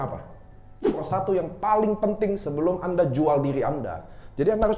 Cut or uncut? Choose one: cut